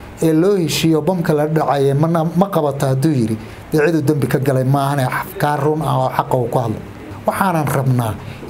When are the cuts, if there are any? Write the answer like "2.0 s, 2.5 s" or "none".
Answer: 7.1 s